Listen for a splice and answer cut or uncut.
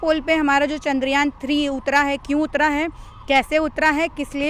uncut